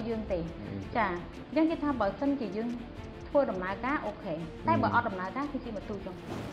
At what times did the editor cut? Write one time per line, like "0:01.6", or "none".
none